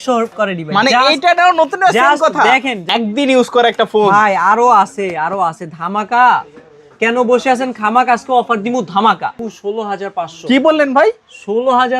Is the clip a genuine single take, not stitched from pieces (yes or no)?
no